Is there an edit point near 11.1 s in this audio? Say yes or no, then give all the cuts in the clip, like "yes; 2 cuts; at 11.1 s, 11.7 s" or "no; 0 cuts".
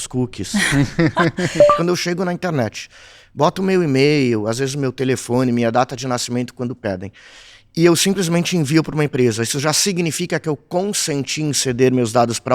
no; 1 cut; at 1.7 s